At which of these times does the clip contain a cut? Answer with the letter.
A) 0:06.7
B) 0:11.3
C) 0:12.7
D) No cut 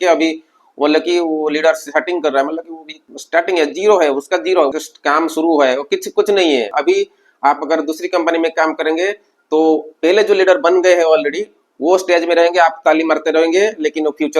A